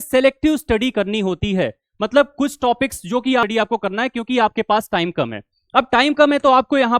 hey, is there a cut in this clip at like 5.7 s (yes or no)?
no